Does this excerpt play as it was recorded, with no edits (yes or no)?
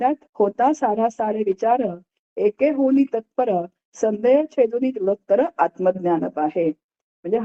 yes